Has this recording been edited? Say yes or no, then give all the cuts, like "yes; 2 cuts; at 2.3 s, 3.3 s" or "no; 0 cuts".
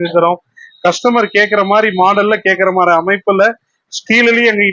no; 0 cuts